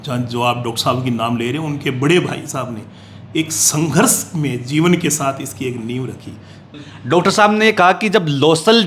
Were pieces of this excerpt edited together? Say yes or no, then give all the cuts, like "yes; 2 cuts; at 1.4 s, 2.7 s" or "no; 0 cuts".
yes; 1 cut; at 6.8 s